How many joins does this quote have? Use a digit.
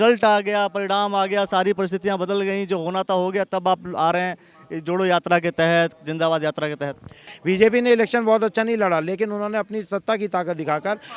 1